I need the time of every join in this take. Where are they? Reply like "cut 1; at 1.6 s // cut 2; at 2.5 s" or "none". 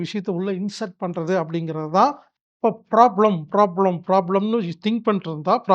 cut 1; at 2.3 s